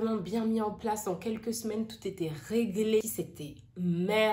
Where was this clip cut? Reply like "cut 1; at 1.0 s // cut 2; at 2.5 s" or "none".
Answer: cut 1; at 3.0 s